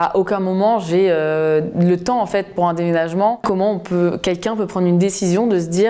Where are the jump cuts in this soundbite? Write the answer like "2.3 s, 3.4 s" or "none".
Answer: 3.4 s